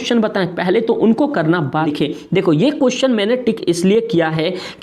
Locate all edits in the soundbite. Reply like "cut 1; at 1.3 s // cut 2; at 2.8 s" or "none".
cut 1; at 1.8 s